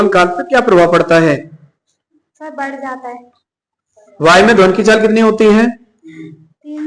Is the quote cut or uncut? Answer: uncut